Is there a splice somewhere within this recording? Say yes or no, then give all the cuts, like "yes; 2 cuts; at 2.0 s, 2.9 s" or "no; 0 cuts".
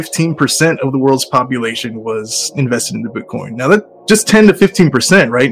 no; 0 cuts